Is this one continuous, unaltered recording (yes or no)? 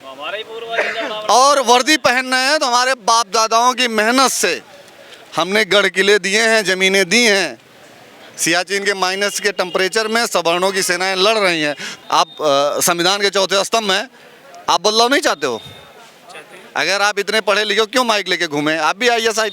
no